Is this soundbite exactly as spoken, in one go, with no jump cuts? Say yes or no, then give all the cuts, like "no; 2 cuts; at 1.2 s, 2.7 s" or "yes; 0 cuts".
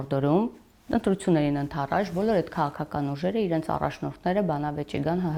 yes; 0 cuts